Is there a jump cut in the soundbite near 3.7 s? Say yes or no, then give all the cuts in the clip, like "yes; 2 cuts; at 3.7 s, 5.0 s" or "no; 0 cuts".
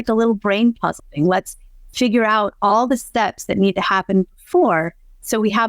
no; 1 cut; at 1.0 s